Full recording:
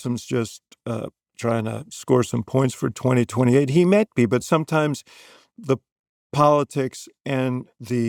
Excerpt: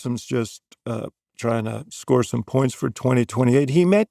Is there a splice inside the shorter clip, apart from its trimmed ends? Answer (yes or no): no